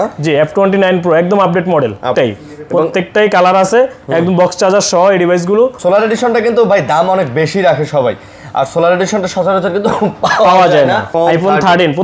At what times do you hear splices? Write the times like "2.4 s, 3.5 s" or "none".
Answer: 2.1 s, 5.8 s, 11.1 s